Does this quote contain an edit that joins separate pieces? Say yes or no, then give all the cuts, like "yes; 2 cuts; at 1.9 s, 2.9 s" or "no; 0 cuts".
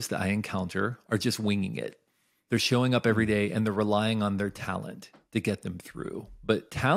yes; 1 cut; at 1.0 s